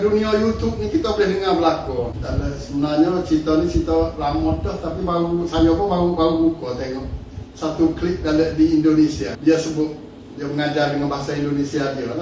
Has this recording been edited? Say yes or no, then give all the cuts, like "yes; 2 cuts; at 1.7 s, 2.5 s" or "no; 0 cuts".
yes; 2 cuts; at 2.2 s, 9.3 s